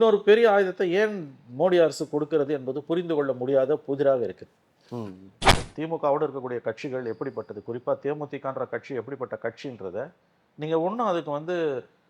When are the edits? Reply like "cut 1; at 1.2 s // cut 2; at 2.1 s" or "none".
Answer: cut 1; at 5.6 s